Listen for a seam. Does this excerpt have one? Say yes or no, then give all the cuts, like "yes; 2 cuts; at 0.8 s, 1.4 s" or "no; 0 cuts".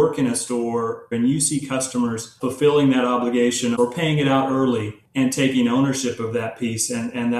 yes; 4 cuts; at 1.1 s, 2.3 s, 3.7 s, 5.0 s